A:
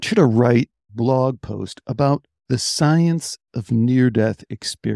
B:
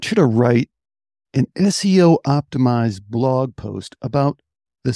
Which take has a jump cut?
A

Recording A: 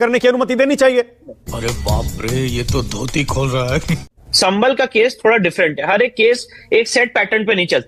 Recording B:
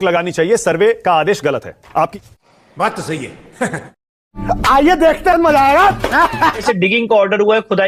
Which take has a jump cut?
B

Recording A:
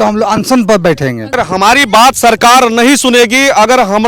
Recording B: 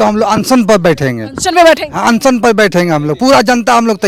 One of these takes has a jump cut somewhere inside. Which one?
A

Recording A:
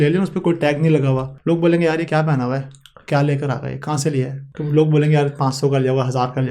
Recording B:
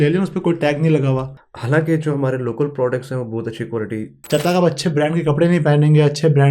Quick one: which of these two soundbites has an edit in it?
B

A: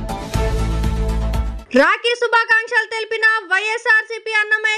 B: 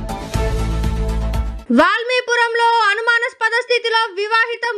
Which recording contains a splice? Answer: A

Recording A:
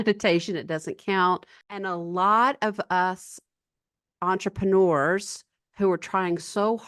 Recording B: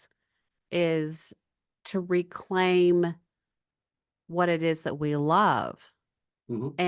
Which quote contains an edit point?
A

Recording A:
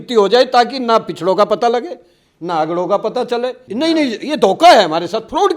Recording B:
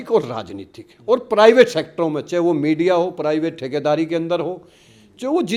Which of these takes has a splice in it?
A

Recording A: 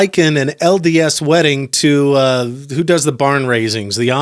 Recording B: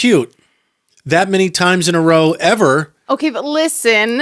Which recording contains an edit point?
B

